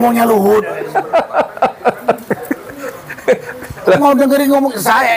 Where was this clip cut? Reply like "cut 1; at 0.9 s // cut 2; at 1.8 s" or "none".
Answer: none

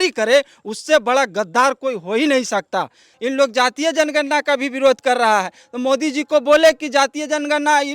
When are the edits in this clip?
cut 1; at 3.1 s

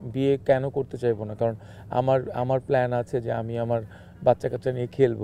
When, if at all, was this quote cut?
none

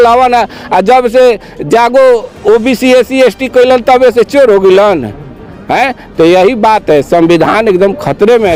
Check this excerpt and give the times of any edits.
none

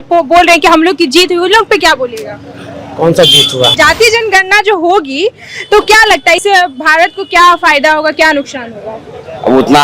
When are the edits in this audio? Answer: cut 1; at 3.8 s

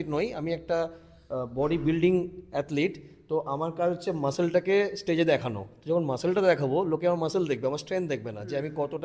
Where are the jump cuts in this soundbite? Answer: none

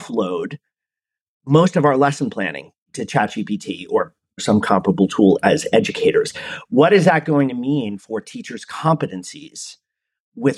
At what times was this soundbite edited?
cut 1; at 4.4 s

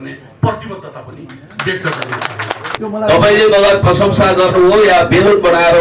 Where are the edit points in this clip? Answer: cut 1; at 2.7 s

